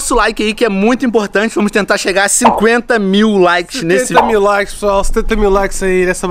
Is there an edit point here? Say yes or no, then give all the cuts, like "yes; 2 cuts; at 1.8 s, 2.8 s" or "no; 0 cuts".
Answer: no; 0 cuts